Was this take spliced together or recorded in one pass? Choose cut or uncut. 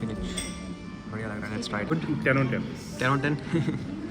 cut